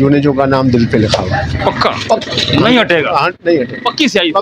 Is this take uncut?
yes; 0 cuts

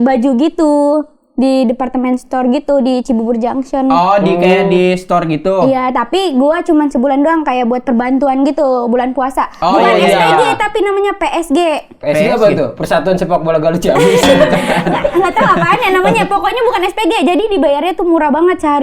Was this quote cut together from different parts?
no; 0 cuts

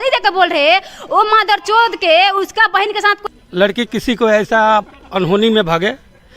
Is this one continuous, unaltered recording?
no; 1 cut; at 3.2 s

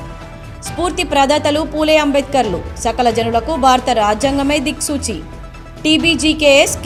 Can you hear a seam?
no; 0 cuts

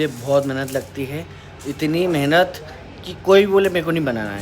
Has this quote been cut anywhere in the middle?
no; 0 cuts

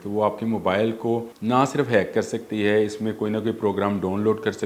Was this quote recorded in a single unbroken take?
no; 1 cut; at 1.3 s

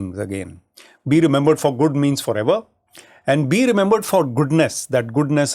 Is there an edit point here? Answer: no; 0 cuts

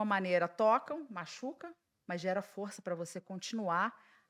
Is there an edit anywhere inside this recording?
no; 0 cuts

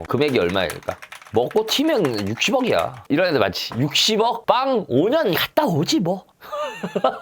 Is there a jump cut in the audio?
yes; 1 cut; at 1.2 s

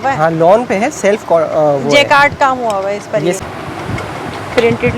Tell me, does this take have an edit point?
yes; 1 cut; at 3.4 s

